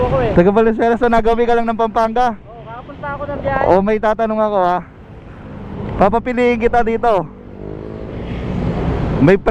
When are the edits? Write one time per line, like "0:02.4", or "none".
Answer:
none